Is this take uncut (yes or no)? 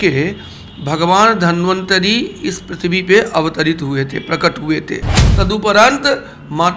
no